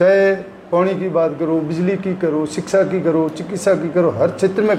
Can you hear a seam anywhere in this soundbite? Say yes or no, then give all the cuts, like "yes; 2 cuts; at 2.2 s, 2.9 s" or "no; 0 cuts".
no; 0 cuts